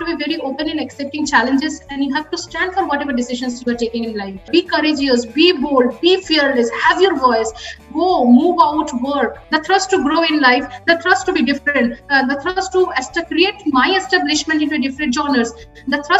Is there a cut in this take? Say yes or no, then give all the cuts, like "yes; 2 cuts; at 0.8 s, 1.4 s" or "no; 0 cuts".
yes; 2 cuts; at 4.5 s, 9.4 s